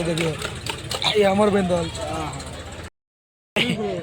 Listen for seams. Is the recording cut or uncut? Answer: cut